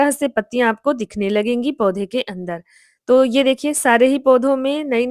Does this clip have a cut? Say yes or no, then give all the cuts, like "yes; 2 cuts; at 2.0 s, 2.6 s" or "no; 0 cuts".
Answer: no; 0 cuts